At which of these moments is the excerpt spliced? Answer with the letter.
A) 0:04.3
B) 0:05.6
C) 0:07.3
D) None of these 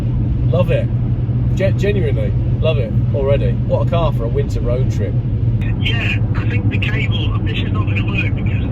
B